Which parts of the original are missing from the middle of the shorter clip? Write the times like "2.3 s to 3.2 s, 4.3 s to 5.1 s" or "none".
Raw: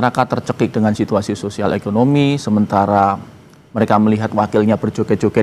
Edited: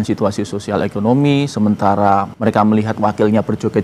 3.2 s to 3.7 s